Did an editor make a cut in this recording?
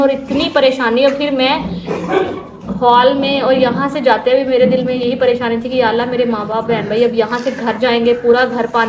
no; 0 cuts

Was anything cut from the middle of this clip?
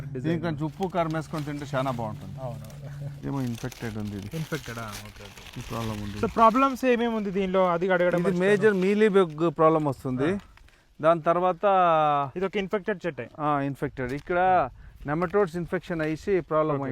yes; 1 cut; at 3.1 s

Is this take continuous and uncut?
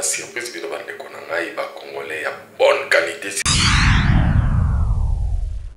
no; 1 cut; at 3.3 s

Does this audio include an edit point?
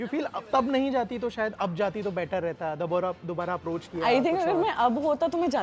no; 0 cuts

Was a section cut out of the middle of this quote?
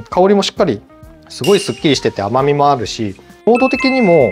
yes; 2 cuts; at 0.9 s, 3.5 s

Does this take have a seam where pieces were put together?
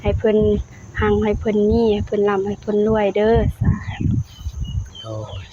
no; 0 cuts

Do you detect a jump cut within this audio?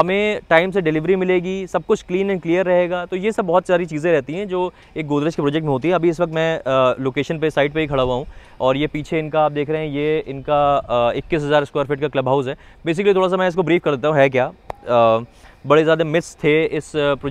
no; 0 cuts

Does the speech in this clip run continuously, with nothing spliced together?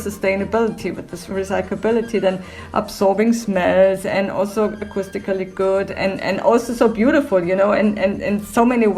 yes; 0 cuts

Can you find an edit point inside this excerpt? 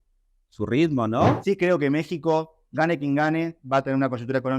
yes; 1 cut; at 1.4 s

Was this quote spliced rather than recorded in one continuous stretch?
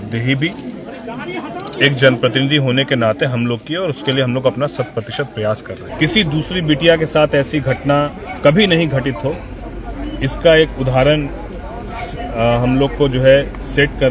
yes; 1 cut; at 5.8 s

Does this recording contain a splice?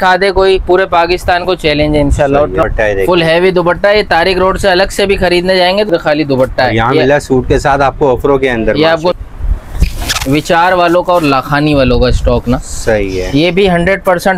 yes; 3 cuts; at 2.6 s, 5.9 s, 9.2 s

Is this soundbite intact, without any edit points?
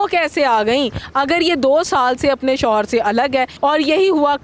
no; 1 cut; at 3.5 s

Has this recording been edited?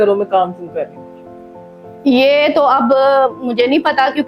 no; 0 cuts

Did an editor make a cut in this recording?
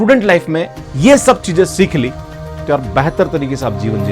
no; 0 cuts

